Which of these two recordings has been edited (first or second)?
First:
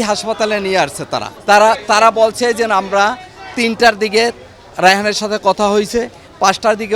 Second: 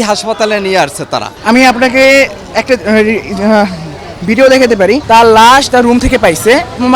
second